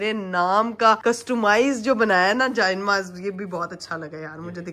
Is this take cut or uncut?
uncut